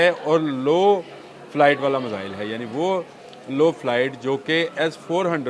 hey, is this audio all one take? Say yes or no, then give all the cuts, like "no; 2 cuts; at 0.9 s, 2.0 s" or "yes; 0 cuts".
yes; 0 cuts